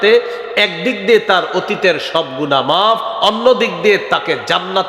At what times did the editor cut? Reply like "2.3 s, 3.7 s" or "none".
none